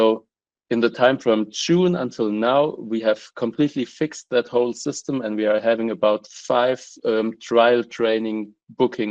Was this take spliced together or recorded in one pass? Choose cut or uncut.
uncut